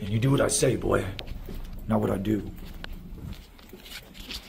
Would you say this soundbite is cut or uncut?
uncut